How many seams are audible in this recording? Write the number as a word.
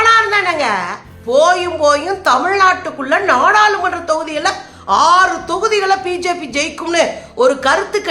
one